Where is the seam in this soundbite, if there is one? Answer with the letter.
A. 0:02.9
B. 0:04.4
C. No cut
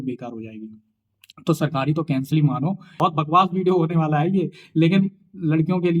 A